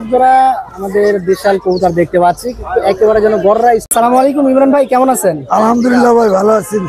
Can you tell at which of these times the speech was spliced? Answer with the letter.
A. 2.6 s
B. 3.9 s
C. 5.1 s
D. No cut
B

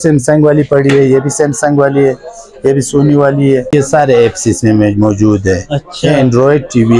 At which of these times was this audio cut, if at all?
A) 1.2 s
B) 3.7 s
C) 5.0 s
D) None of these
B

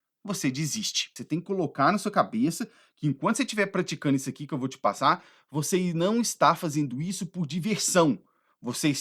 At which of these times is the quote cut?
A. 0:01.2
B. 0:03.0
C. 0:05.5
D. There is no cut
A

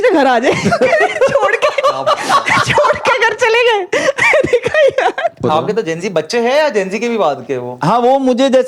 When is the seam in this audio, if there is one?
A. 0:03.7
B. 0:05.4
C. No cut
B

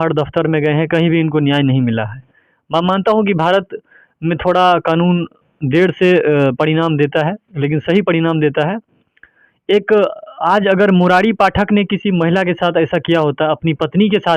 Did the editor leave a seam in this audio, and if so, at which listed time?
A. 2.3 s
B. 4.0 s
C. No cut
C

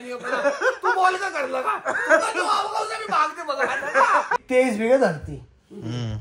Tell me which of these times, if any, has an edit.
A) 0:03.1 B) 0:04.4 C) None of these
B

